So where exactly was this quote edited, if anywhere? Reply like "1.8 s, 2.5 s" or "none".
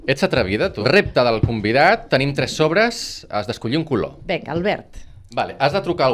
0.9 s, 4.2 s, 5.2 s